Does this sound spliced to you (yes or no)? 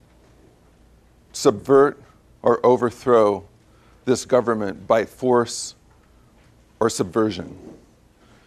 no